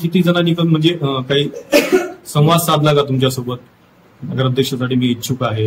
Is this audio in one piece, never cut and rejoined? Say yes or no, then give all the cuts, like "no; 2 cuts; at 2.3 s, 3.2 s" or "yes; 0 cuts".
yes; 0 cuts